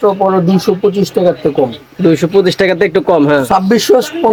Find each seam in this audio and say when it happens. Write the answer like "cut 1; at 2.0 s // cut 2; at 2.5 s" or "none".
none